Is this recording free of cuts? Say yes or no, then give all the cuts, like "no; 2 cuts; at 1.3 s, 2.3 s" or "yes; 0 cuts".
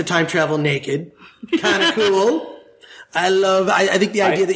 yes; 0 cuts